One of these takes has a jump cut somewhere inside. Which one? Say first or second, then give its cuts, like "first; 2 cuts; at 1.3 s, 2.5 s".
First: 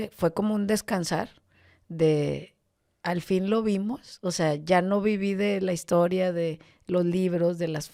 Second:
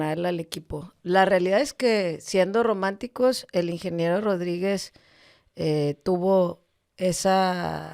second; 1 cut; at 0.9 s